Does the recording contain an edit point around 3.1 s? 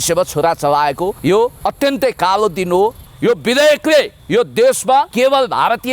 yes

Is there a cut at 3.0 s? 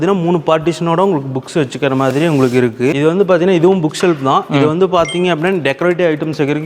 yes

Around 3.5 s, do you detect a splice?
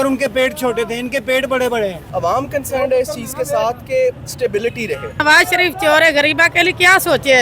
no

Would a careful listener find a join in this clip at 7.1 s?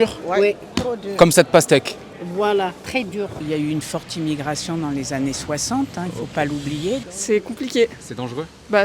yes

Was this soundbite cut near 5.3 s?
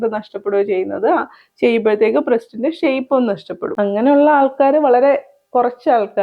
no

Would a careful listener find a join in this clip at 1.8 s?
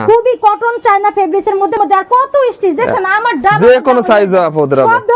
yes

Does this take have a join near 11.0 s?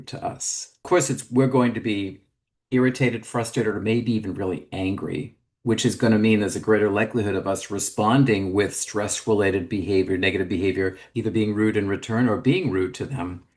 yes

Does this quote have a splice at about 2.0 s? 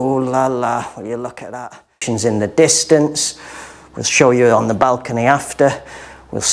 yes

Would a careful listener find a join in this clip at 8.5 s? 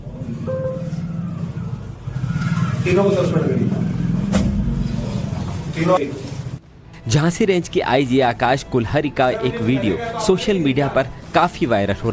no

